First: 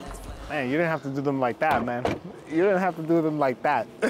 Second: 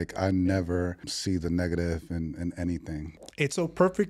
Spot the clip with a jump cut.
second; 2 cuts; at 1.1 s, 3.1 s

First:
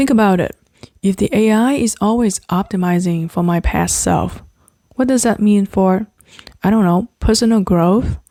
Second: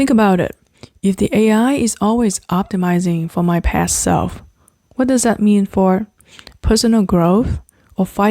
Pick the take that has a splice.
second; 1 cut; at 6.5 s

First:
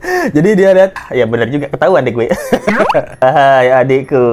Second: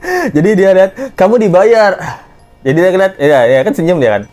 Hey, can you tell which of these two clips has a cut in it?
first; 2 cuts; at 1.0 s, 3.2 s

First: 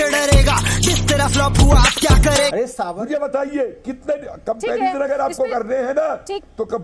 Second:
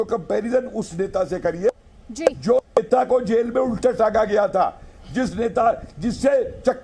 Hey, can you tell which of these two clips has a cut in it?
first; 1 cut; at 2.9 s

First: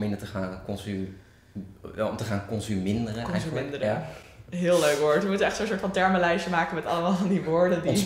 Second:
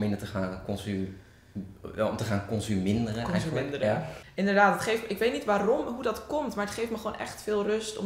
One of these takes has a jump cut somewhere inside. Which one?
second; 1 cut; at 4.2 s

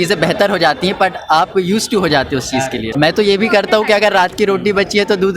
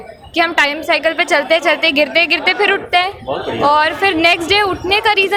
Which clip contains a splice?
first; 1 cut; at 2.9 s

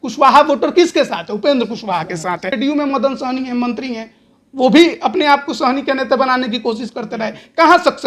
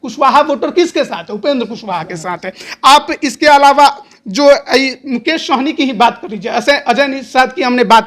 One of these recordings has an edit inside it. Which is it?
first; 1 cut; at 2.5 s

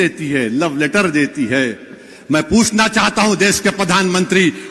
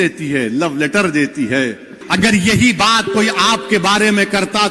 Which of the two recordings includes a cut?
second; 1 cut; at 2.0 s

